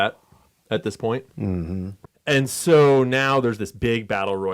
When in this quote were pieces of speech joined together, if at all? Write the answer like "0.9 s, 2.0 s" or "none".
2.0 s